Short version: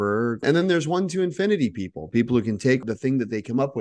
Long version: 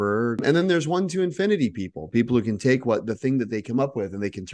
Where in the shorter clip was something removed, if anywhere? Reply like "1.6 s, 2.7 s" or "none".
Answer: 2.8 s